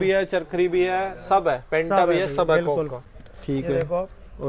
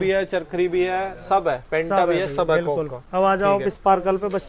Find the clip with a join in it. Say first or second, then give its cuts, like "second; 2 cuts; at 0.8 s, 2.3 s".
first; 1 cut; at 3.0 s